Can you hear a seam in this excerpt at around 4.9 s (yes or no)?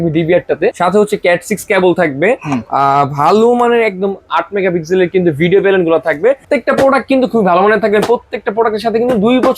no